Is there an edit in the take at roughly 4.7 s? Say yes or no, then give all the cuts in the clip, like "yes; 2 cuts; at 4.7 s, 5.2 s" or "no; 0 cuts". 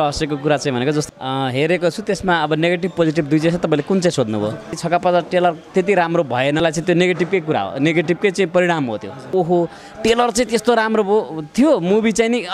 yes; 4 cuts; at 1.0 s, 4.7 s, 6.6 s, 9.3 s